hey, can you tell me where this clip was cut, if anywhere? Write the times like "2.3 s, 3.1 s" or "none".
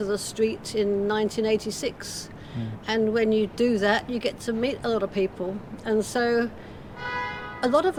none